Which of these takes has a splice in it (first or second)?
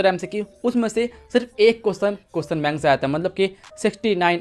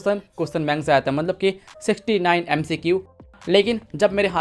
second